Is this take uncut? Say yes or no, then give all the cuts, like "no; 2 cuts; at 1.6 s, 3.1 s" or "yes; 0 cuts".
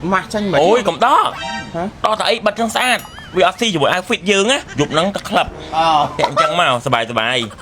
no; 1 cut; at 4.7 s